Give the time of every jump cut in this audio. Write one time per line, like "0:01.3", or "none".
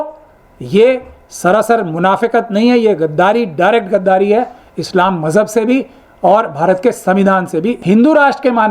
0:07.8